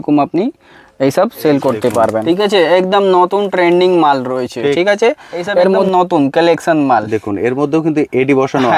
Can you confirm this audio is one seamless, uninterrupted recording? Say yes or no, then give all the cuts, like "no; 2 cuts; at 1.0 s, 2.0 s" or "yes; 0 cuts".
no; 2 cuts; at 2.2 s, 5.9 s